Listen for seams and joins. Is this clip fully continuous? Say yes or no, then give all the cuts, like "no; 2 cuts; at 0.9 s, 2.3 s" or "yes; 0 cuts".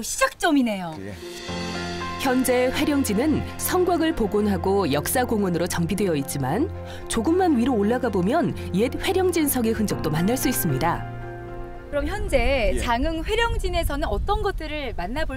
no; 1 cut; at 7.0 s